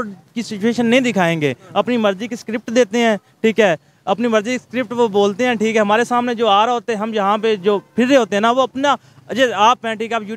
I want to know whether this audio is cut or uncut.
uncut